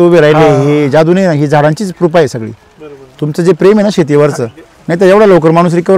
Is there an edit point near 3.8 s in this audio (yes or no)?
no